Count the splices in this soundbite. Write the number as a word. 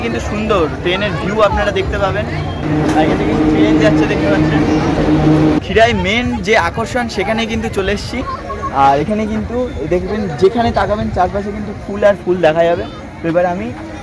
zero